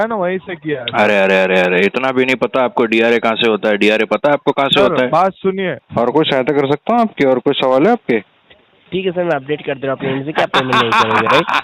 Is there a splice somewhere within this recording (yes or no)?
yes